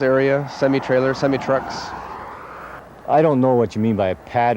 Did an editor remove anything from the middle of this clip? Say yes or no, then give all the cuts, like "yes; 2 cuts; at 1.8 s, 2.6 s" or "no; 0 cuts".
yes; 1 cut; at 2.7 s